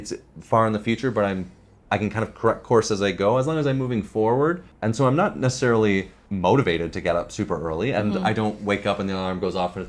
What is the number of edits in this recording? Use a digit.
2